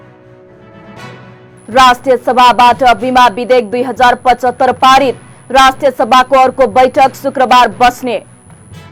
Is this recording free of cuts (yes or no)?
yes